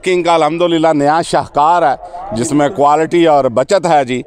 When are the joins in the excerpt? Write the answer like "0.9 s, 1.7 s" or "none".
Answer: none